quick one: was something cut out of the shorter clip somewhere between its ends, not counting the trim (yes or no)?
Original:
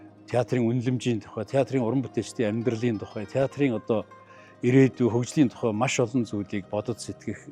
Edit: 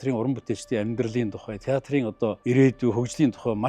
yes